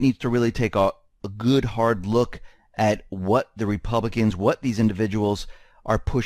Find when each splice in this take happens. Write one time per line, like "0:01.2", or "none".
none